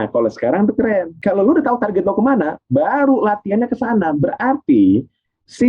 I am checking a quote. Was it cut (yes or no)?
yes